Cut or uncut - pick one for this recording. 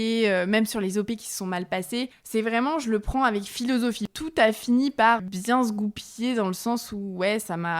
cut